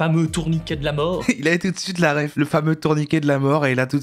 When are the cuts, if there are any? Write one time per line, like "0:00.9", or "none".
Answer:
0:01.2
0:02.3